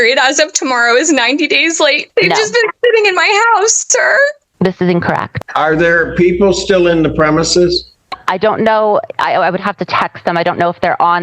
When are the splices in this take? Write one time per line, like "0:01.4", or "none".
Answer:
0:02.0
0:05.3